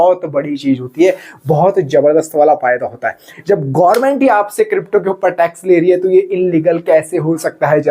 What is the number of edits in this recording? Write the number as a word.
one